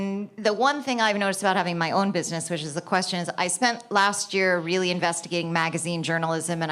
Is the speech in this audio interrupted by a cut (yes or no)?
no